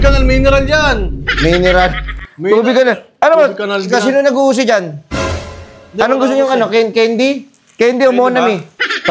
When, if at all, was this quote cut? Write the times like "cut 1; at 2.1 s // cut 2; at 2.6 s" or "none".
none